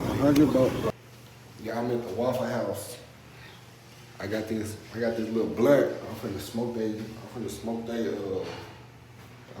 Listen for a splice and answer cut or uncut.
cut